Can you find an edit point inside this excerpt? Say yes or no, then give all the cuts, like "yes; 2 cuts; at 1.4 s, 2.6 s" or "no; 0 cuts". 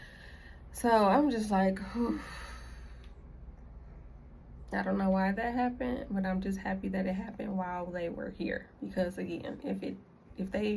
no; 0 cuts